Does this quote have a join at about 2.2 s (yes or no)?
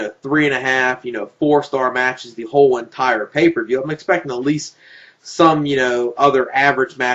yes